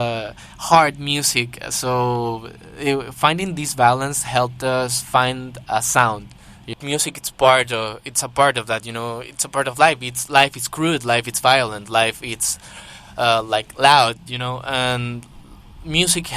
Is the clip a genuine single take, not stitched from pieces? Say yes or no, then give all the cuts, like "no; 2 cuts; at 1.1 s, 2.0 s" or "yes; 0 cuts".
no; 1 cut; at 6.6 s